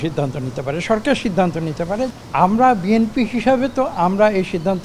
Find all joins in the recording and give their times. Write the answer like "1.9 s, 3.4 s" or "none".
2.1 s

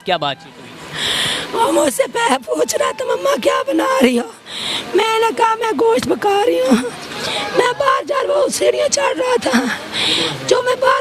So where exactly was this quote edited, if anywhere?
none

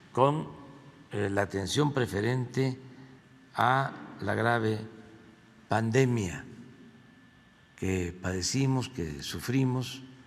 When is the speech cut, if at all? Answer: none

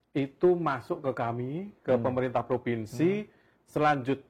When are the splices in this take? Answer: none

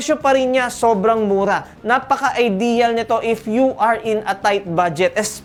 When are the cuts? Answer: none

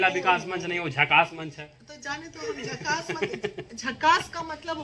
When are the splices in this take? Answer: none

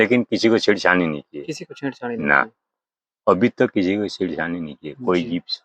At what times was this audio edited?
none

